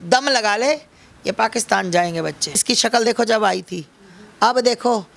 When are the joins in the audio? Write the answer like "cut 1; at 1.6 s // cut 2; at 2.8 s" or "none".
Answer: cut 1; at 2.6 s